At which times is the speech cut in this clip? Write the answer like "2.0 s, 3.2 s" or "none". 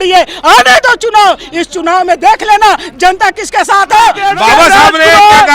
4.2 s